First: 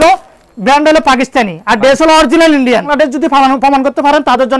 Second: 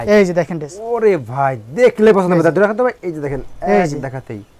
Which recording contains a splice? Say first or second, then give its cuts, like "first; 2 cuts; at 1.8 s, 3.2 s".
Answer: first; 1 cut; at 2.9 s